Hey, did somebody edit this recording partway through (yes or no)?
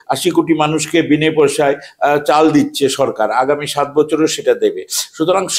no